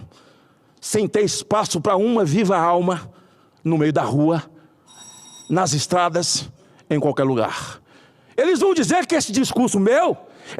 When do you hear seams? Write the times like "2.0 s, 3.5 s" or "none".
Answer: none